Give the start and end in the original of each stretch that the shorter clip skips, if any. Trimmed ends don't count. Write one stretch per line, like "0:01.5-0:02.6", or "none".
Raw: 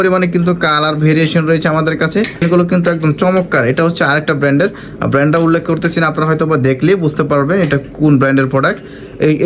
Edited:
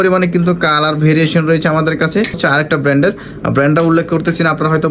0:02.4-0:03.9